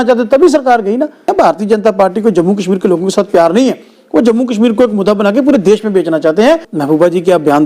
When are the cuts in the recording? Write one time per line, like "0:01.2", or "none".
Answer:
0:01.3
0:06.7